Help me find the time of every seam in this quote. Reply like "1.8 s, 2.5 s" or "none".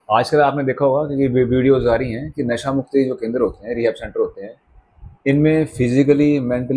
none